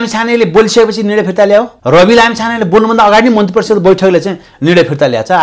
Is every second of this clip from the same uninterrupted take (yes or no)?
no